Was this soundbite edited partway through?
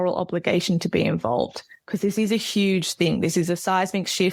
no; 0 cuts

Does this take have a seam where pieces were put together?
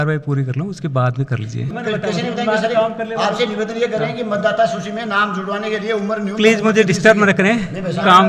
no; 0 cuts

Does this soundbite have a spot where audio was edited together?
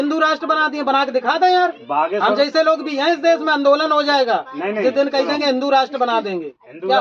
no; 0 cuts

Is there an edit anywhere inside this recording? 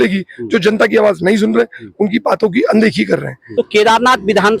yes; 1 cut; at 3.4 s

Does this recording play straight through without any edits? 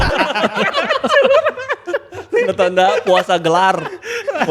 yes; 0 cuts

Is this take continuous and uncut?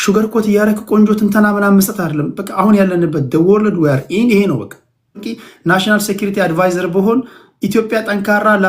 no; 1 cut; at 5.2 s

